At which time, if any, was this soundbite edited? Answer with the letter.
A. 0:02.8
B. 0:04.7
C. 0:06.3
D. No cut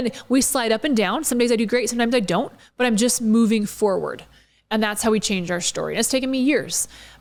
D